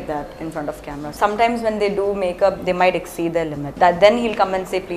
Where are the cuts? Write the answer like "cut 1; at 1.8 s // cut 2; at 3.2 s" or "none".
cut 1; at 1.0 s // cut 2; at 3.6 s

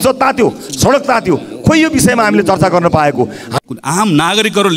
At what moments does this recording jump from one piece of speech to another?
cut 1; at 3.4 s

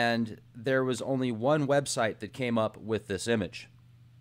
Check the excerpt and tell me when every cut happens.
none

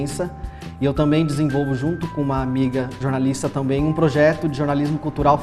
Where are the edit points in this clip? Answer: none

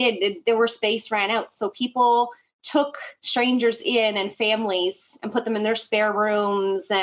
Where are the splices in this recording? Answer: none

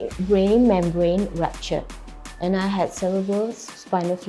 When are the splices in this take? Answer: none

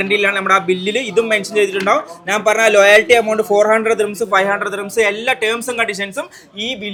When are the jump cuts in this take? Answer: none

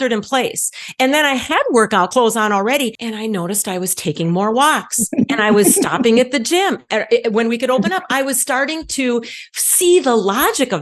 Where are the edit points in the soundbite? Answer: cut 1; at 2.1 s

